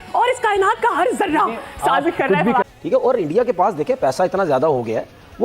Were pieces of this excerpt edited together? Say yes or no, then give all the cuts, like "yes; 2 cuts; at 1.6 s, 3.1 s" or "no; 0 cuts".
yes; 1 cut; at 2.8 s